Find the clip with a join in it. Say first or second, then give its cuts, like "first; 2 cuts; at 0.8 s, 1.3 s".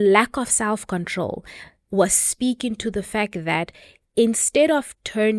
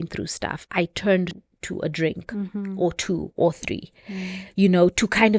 second; 1 cut; at 1.5 s